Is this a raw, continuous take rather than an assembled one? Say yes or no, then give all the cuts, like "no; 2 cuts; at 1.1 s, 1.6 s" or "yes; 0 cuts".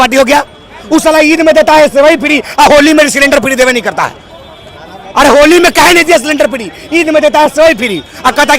yes; 0 cuts